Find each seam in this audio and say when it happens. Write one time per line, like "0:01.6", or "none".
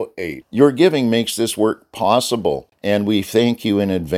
0:02.7